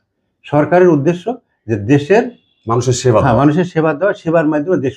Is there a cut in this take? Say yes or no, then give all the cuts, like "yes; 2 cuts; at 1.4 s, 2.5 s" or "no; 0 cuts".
no; 0 cuts